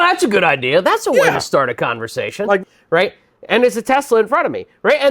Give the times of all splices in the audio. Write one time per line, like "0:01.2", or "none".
0:02.6